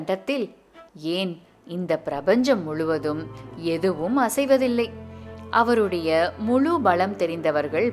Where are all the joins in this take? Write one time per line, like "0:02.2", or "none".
none